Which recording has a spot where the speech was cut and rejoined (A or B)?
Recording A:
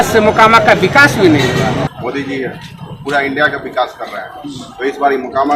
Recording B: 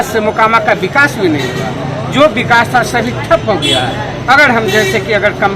A